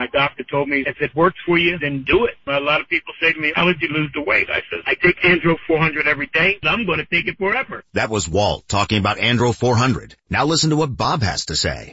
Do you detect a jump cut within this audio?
no; 0 cuts

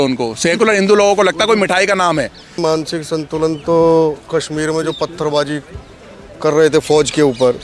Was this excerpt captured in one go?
no; 1 cut; at 2.6 s

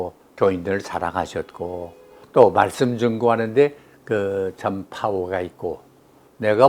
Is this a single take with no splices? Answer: no; 1 cut; at 2.2 s

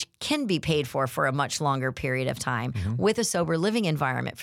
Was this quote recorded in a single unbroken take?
yes; 0 cuts

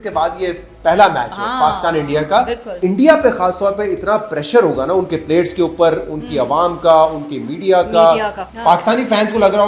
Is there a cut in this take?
yes; 2 cuts; at 2.7 s, 8.4 s

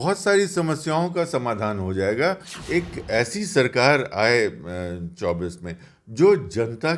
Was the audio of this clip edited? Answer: yes; 1 cut; at 2.5 s

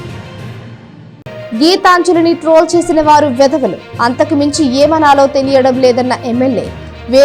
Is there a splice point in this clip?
yes; 1 cut; at 1.1 s

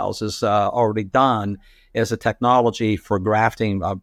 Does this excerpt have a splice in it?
no; 0 cuts

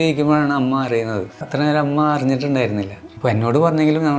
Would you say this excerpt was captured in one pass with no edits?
no; 2 cuts; at 1.5 s, 3.0 s

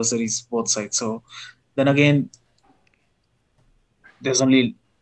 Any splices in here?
no; 0 cuts

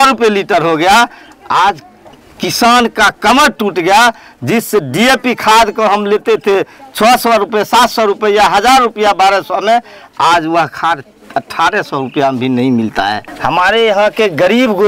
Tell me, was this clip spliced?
yes; 1 cut; at 13.3 s

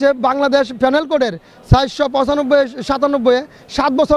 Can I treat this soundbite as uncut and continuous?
yes; 0 cuts

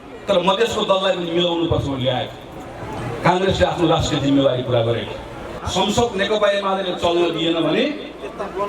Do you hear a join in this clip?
yes; 1 cut; at 5.6 s

